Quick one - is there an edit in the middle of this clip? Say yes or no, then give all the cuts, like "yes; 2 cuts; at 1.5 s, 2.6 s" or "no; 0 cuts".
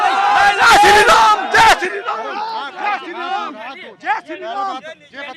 no; 0 cuts